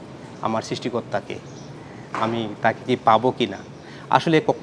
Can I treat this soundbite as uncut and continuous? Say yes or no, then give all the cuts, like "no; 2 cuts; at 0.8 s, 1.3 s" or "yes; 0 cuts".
yes; 0 cuts